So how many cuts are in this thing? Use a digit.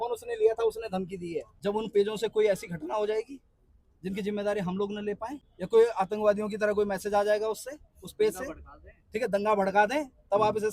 2